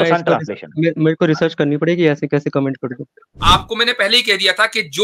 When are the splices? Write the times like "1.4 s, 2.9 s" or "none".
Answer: 3.4 s